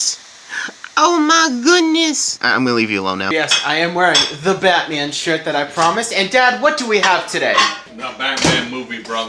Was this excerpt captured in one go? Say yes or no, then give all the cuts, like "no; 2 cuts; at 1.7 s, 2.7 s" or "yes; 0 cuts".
no; 2 cuts; at 2.3 s, 3.3 s